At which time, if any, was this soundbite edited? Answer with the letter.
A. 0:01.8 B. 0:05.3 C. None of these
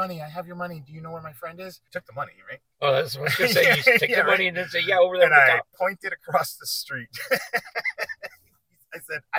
A